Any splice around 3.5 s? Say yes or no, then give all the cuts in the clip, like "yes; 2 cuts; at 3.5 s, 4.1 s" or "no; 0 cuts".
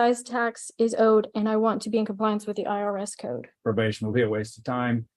yes; 1 cut; at 3.5 s